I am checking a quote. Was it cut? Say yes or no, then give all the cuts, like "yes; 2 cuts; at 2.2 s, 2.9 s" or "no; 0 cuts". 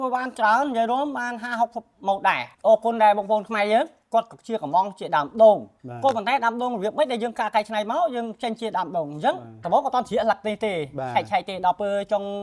yes; 3 cuts; at 2.5 s, 4.0 s, 9.5 s